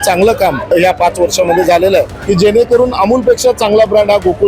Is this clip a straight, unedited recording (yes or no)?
no